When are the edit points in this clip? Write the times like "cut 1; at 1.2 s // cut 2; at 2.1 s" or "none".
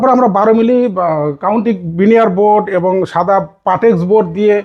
none